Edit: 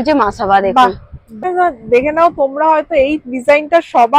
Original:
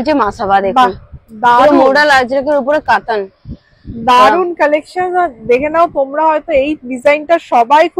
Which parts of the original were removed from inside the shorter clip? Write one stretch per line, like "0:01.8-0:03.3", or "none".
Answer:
0:01.3-0:04.9